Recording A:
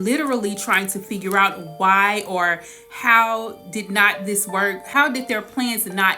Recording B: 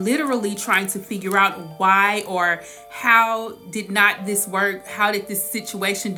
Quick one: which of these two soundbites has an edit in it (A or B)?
A